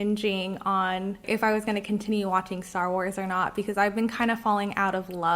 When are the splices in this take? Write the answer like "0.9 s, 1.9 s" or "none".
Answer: 1.2 s